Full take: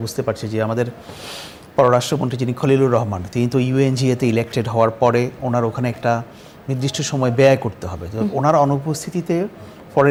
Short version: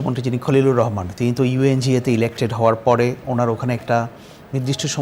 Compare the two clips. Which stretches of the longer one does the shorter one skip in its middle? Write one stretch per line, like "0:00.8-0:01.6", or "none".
none